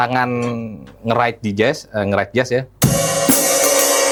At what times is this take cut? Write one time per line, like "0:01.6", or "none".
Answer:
none